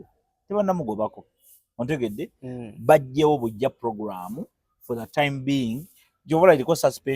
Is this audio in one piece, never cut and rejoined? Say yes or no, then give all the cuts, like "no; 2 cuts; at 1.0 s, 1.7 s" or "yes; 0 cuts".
yes; 0 cuts